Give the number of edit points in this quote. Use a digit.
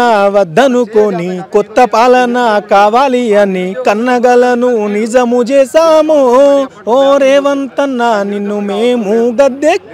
0